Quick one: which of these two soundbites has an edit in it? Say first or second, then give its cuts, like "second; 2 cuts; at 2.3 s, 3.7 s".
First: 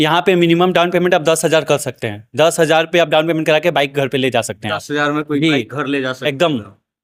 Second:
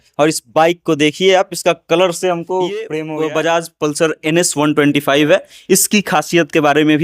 second; 1 cut; at 2.9 s